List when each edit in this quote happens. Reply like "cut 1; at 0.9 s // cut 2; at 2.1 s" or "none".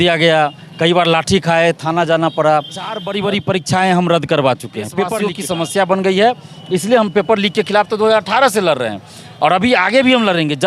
cut 1; at 3.0 s // cut 2; at 5.3 s

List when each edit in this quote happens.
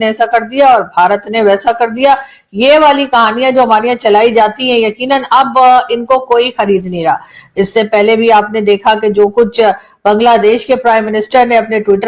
none

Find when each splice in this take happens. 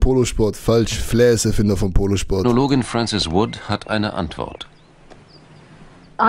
none

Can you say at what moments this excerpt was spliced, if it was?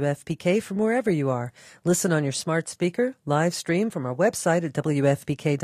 none

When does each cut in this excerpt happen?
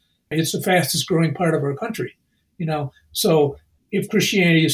none

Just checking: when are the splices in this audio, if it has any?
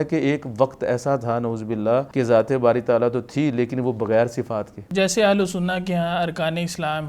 cut 1; at 2.1 s // cut 2; at 4.8 s

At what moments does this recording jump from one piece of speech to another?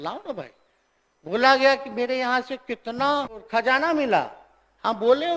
cut 1; at 3.4 s

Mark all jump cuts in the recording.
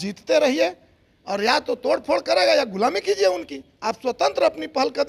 none

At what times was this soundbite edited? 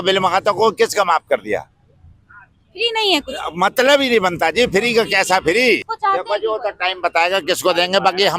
cut 1; at 5.8 s

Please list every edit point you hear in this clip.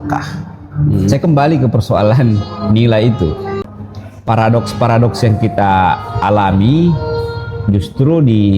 cut 1; at 1.1 s // cut 2; at 3.6 s

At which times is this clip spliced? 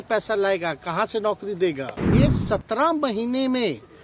cut 1; at 2.0 s

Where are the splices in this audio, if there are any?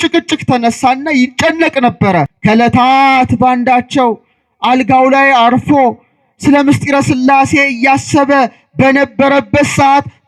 cut 1; at 2.3 s

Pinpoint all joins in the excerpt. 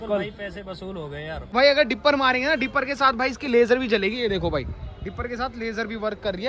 cut 1; at 1.5 s

